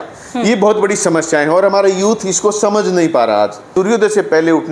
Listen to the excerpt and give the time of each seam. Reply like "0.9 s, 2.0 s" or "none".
3.7 s

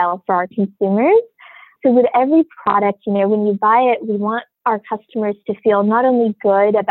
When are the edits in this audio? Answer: 1.7 s, 4.5 s

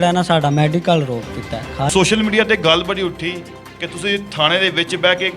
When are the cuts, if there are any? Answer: 1.9 s

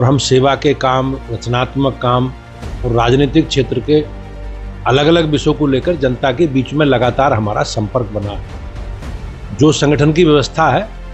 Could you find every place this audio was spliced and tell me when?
none

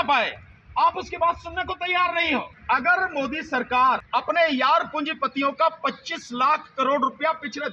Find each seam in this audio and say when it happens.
2.5 s, 4.0 s

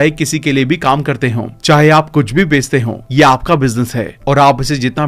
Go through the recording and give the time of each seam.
none

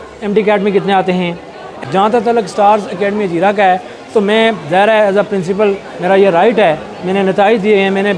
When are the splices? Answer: 1.7 s

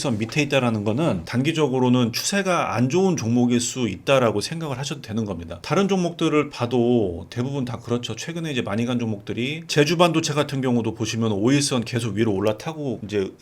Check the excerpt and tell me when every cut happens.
9.7 s

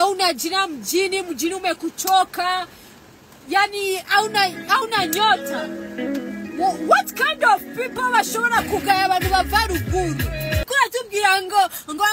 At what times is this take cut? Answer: 10.6 s

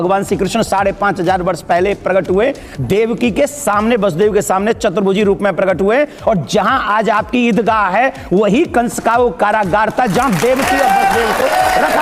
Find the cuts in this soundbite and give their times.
11.1 s

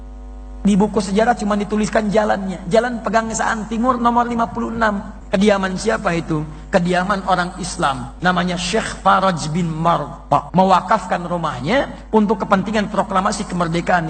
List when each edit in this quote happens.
5.1 s, 8.1 s, 10.5 s

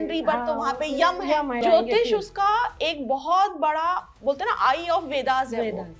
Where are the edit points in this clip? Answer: 1.6 s

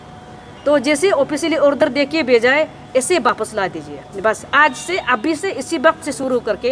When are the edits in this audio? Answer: none

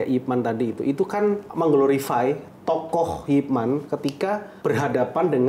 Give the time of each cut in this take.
1.5 s, 4.5 s

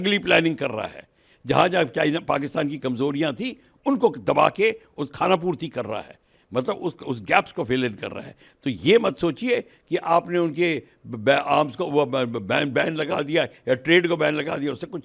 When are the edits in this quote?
none

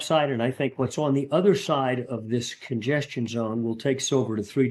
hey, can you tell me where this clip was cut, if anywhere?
none

